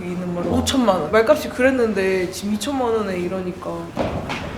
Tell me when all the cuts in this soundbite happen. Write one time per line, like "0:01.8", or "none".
0:01.1
0:03.8